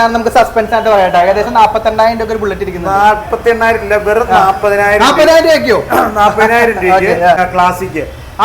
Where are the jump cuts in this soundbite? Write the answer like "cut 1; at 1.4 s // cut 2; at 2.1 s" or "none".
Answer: cut 1; at 7.4 s